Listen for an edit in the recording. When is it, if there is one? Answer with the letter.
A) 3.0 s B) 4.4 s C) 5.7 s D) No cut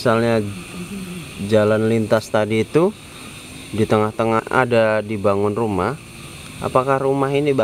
B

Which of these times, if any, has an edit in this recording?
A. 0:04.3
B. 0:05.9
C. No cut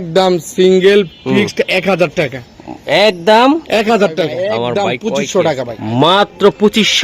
A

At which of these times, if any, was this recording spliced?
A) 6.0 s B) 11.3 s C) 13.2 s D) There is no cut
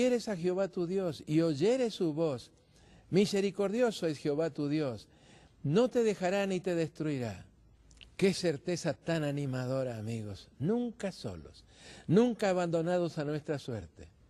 A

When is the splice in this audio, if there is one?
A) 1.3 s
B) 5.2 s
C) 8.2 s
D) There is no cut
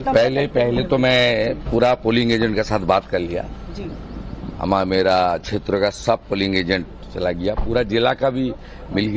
C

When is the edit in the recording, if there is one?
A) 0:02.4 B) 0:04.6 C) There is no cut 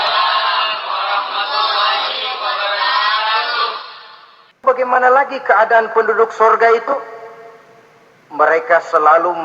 B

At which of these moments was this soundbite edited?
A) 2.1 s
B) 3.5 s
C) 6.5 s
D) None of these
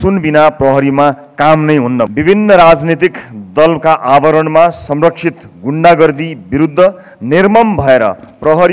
A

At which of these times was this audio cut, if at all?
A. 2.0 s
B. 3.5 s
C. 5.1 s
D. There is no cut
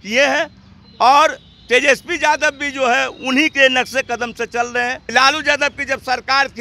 C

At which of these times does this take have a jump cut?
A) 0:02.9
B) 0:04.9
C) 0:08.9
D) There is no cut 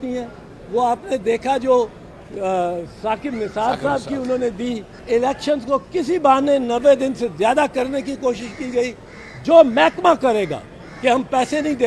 B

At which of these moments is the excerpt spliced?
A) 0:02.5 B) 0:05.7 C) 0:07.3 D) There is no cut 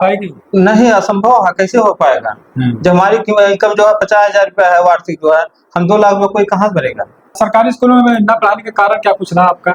C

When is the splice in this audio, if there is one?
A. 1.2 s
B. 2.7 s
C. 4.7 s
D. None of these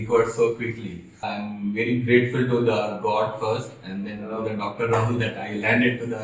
A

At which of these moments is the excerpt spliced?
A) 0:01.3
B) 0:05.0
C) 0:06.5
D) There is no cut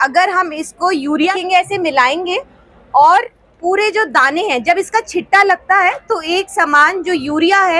A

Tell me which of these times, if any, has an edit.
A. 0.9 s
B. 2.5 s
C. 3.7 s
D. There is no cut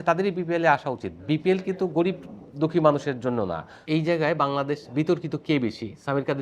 C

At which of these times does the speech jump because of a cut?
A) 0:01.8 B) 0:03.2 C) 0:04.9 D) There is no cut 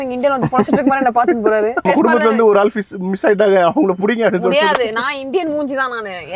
A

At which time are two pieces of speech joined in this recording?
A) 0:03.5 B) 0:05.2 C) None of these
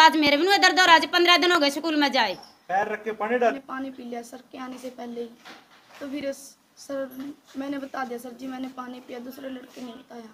A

